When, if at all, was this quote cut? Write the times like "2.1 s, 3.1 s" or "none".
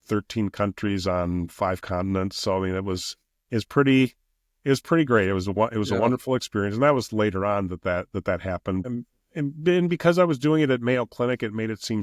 8.8 s